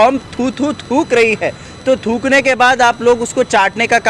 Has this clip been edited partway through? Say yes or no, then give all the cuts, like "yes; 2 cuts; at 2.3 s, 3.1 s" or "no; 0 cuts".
no; 0 cuts